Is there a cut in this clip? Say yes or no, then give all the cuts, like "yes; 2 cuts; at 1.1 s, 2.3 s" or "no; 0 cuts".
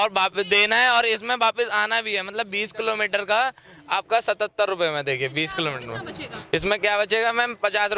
no; 0 cuts